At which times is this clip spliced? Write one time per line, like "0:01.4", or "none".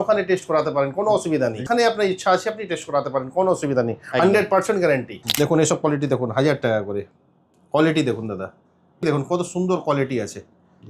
0:01.6
0:05.2
0:09.0